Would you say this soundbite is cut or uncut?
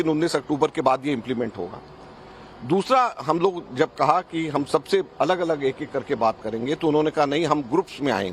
cut